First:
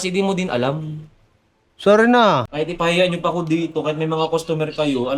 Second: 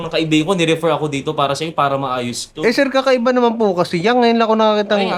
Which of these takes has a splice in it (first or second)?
first